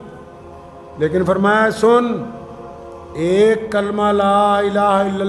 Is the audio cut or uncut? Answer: uncut